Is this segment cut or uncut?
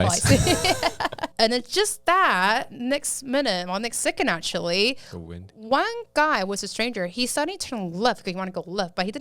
cut